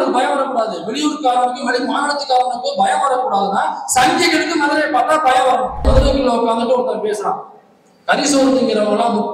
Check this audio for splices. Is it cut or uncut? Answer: cut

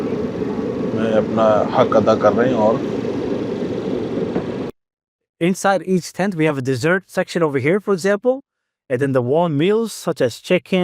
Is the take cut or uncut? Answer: cut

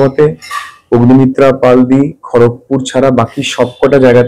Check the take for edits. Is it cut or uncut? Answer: uncut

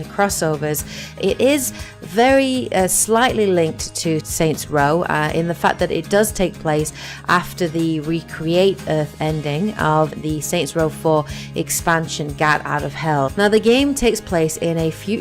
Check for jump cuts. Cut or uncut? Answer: cut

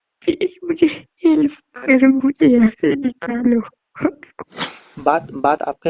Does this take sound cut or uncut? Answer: cut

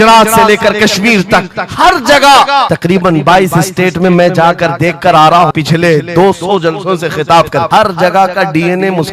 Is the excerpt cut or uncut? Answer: cut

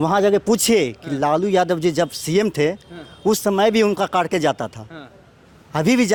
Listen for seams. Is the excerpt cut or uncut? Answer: uncut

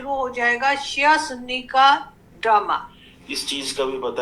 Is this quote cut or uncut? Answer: cut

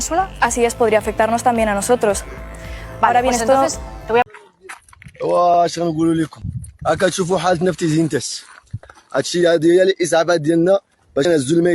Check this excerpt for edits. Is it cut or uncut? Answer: cut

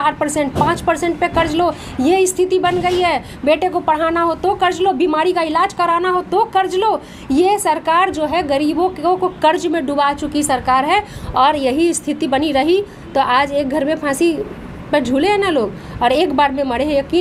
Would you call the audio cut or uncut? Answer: uncut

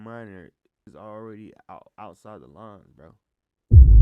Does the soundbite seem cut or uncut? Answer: cut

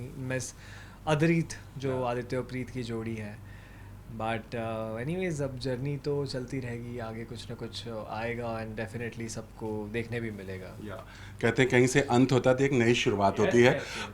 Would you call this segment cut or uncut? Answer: uncut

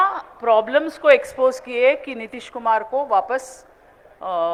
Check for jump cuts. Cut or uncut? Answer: uncut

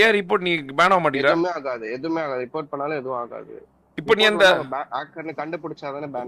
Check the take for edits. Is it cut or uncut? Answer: uncut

